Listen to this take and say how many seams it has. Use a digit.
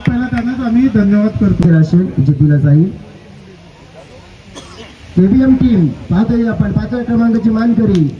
1